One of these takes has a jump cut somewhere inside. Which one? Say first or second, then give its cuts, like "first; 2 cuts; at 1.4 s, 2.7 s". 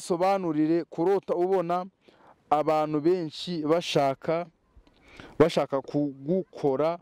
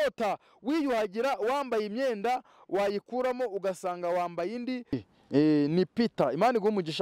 second; 1 cut; at 5.0 s